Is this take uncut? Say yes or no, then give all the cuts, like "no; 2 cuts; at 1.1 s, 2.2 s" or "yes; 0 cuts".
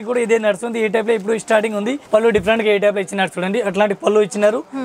no; 1 cut; at 2.0 s